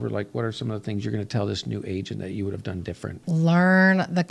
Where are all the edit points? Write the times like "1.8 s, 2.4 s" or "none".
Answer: 3.2 s